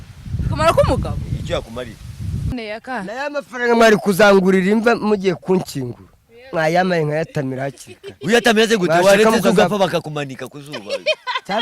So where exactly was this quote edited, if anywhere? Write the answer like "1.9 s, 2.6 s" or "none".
2.5 s